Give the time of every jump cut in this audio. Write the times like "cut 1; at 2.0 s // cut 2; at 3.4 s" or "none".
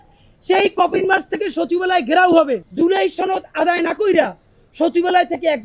cut 1; at 2.7 s